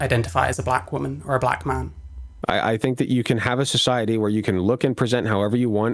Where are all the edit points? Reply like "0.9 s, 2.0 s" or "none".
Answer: 2.3 s